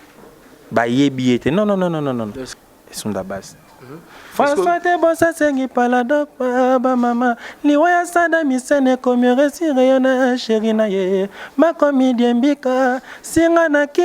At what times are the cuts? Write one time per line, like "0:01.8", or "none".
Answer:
0:02.4

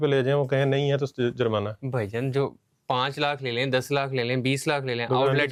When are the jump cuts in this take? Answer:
none

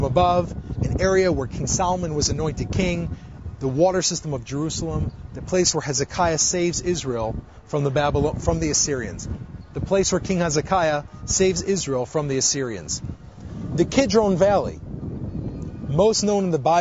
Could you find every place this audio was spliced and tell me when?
none

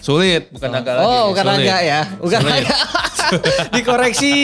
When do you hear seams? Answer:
none

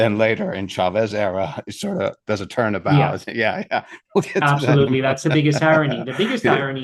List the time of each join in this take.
none

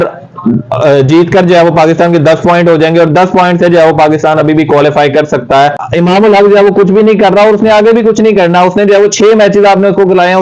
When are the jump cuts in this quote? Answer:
0:05.8

